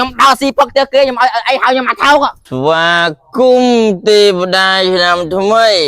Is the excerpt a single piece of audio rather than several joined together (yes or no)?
no